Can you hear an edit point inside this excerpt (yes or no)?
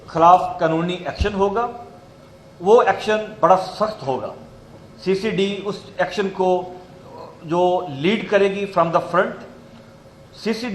no